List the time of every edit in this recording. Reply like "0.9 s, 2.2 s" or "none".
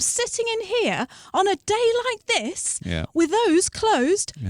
none